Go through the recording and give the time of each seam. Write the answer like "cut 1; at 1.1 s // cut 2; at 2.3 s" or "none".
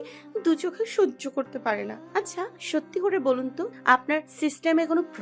cut 1; at 2.6 s // cut 2; at 4.1 s